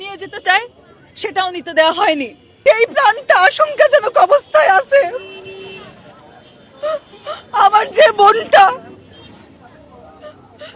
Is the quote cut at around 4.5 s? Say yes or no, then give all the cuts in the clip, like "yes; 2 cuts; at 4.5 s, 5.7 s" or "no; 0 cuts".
no; 1 cut; at 2.4 s